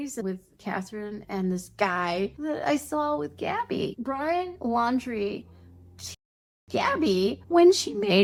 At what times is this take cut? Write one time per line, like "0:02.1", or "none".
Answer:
none